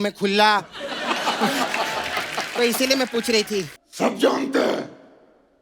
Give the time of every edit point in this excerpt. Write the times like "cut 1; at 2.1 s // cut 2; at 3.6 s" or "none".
cut 1; at 3.8 s